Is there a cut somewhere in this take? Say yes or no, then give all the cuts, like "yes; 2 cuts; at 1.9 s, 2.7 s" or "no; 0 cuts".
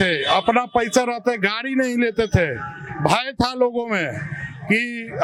no; 0 cuts